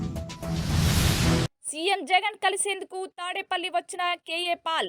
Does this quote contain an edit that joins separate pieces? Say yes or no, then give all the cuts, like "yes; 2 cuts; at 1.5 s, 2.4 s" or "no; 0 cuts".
yes; 1 cut; at 1.3 s